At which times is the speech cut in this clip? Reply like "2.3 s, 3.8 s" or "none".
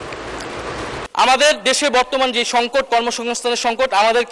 1.1 s